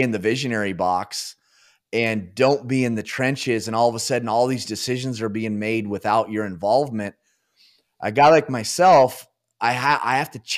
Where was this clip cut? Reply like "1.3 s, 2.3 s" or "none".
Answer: none

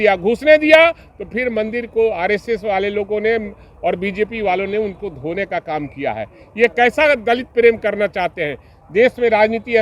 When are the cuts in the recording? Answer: none

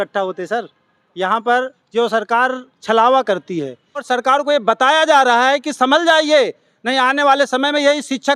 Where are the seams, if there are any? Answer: 4.0 s

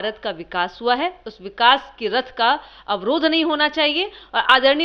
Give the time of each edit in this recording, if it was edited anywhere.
none

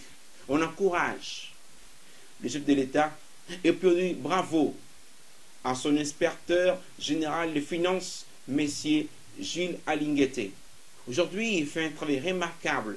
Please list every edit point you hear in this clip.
none

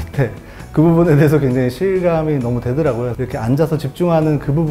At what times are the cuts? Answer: 3.1 s

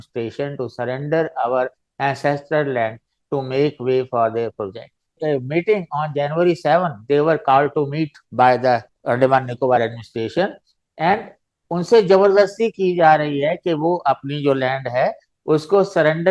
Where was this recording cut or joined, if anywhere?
5.2 s

